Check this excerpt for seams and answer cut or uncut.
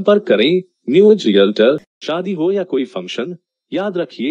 cut